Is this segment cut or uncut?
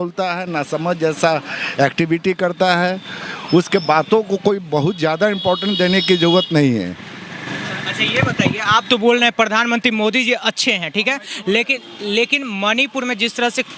uncut